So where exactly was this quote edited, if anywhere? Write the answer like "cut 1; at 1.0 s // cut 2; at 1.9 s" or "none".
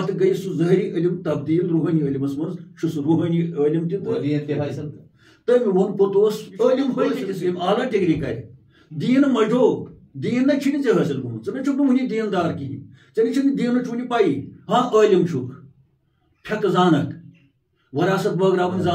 cut 1; at 7.1 s